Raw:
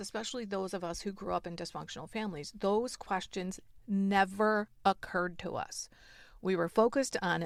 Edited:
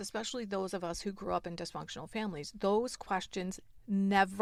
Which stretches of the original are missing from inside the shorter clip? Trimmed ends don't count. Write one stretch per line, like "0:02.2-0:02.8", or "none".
none

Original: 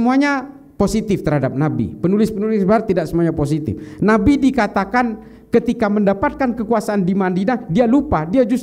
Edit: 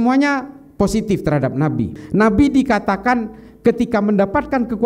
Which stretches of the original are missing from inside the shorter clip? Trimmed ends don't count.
0:01.9-0:03.8

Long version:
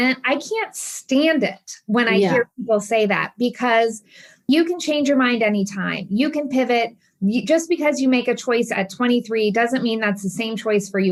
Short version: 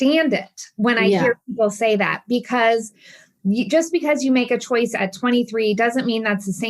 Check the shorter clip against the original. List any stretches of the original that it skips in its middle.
0:04.3-0:07.0

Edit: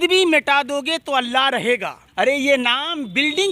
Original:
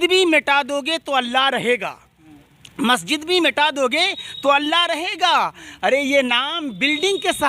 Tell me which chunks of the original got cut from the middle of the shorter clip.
0:02.0-0:05.6

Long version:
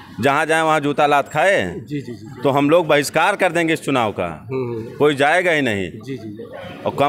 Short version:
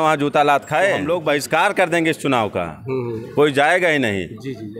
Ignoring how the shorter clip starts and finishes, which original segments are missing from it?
0:01.7-0:02.7

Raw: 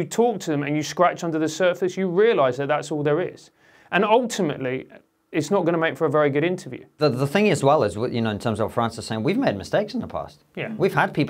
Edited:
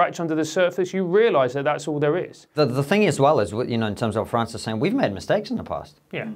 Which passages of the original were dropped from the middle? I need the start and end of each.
0:03.4-0:06.8

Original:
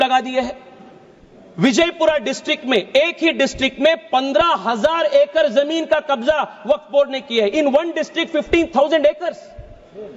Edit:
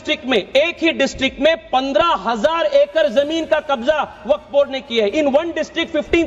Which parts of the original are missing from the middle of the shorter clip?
none

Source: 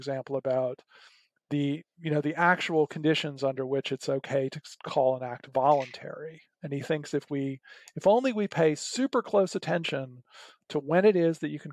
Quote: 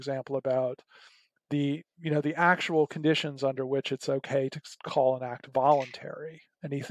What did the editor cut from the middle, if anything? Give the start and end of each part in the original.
none

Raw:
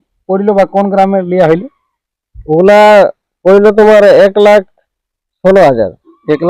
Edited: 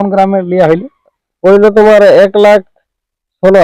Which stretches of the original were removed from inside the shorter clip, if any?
0:02.0-0:03.3

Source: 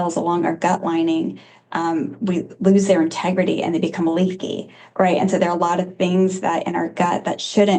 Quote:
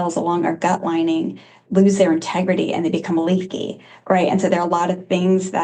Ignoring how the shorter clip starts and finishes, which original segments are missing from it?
0:01.6-0:02.5

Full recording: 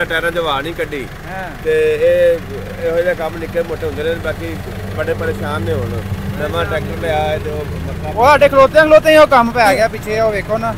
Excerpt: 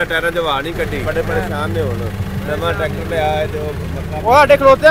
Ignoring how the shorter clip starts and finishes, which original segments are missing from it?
0:01.0-0:04.9

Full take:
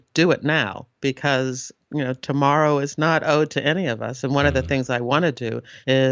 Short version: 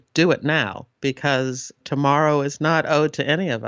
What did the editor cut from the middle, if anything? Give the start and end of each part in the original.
0:01.8-0:02.2

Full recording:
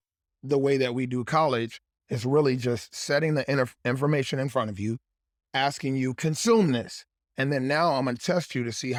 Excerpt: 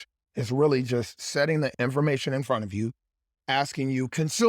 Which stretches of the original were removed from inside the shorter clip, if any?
0:03.5-0:03.8

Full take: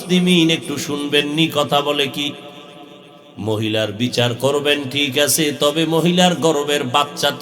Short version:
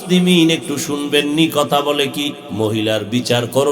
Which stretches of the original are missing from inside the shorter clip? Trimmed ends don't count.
0:02.4-0:03.3

